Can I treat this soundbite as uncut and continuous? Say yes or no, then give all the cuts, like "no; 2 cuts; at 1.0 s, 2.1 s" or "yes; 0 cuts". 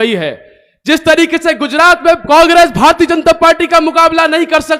no; 1 cut; at 2.2 s